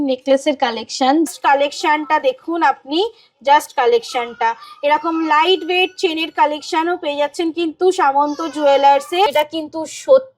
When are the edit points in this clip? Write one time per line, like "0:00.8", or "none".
0:01.3
0:09.3